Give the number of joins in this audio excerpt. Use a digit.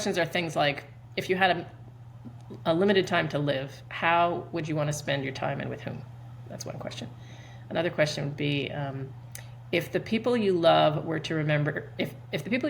0